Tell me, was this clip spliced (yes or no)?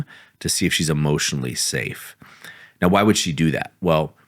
no